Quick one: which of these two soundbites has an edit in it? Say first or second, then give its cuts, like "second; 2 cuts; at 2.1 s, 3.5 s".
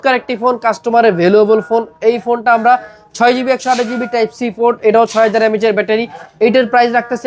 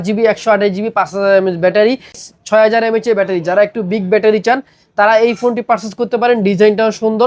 second; 1 cut; at 2.3 s